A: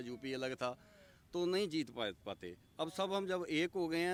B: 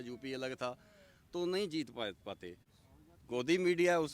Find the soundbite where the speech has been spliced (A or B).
B